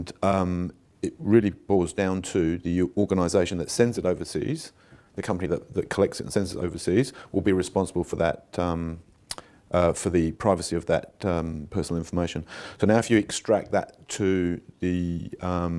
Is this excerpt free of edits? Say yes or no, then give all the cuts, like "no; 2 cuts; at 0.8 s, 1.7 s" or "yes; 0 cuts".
yes; 0 cuts